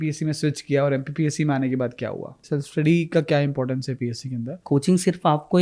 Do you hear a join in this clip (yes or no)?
yes